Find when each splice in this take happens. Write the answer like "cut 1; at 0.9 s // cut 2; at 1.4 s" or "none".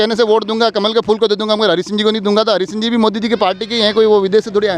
none